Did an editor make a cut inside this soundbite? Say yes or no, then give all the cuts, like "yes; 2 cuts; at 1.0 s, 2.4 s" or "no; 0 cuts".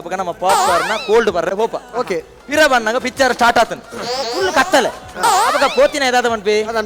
no; 0 cuts